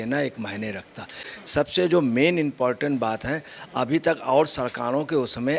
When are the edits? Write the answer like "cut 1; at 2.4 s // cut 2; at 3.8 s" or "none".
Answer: cut 1; at 1.2 s